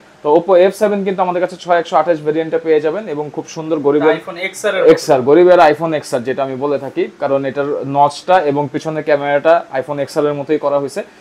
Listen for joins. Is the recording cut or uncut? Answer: uncut